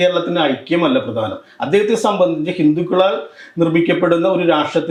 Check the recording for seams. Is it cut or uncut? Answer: uncut